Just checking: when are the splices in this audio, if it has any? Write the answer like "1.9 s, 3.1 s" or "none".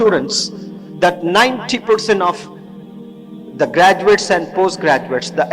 none